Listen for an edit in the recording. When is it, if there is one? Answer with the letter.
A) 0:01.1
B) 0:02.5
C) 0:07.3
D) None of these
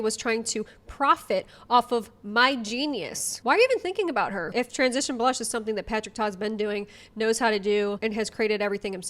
D